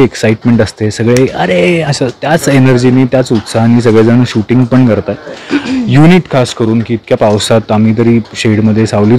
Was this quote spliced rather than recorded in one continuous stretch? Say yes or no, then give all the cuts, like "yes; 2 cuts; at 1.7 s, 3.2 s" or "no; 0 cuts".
no; 0 cuts